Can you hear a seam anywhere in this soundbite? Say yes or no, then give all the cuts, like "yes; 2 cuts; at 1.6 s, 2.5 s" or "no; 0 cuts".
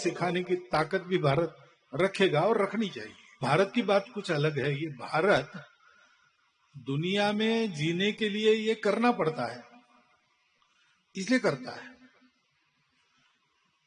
yes; 1 cut; at 3.4 s